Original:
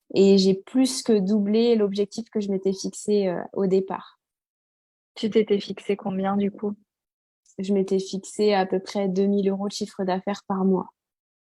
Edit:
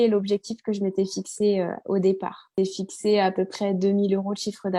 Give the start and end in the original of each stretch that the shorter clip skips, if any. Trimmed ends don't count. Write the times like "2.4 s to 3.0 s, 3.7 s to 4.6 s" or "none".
4.2 s to 7.9 s